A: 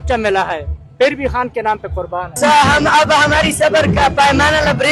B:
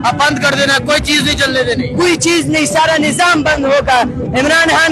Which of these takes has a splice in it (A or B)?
A